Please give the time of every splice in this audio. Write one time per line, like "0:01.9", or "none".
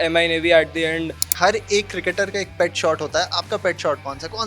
0:01.2